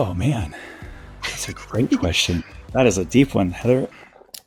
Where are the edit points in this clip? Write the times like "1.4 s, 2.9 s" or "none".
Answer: none